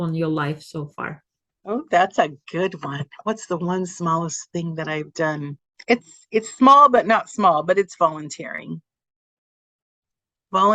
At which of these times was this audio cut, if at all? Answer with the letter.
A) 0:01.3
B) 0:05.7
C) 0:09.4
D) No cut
B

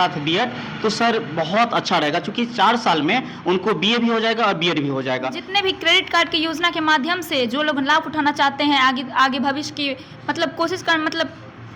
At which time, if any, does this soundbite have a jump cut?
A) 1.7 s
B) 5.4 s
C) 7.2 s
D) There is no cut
B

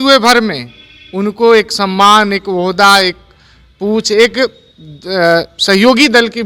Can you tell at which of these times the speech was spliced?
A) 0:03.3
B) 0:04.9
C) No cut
C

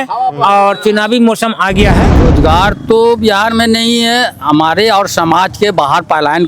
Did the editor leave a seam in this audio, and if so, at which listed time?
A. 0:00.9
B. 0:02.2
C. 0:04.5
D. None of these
B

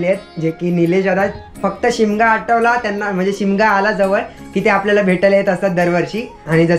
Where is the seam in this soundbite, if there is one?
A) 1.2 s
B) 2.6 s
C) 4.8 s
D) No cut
D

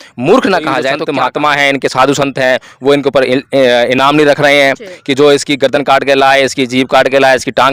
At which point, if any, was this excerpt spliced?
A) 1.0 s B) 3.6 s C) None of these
A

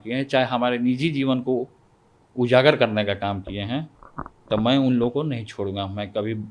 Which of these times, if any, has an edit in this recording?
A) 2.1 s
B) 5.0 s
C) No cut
C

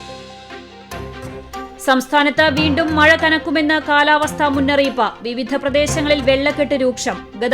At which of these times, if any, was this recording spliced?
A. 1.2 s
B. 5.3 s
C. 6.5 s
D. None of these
A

